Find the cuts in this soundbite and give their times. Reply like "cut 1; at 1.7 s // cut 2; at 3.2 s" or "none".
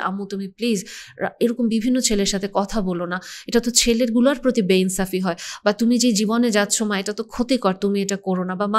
none